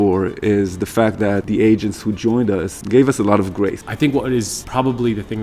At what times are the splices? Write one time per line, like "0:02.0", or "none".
0:01.4
0:02.8
0:03.9
0:04.6